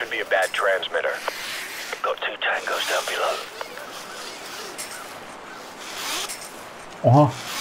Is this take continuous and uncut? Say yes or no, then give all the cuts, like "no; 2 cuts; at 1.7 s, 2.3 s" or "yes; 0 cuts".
yes; 0 cuts